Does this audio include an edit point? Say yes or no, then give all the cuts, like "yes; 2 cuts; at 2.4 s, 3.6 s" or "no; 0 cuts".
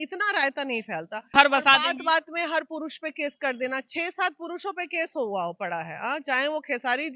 yes; 1 cut; at 1.3 s